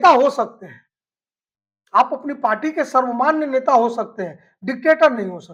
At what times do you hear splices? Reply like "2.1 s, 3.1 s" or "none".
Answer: none